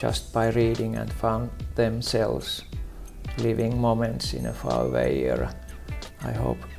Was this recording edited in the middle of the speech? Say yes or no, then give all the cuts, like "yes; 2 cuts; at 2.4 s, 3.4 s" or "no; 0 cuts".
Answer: no; 0 cuts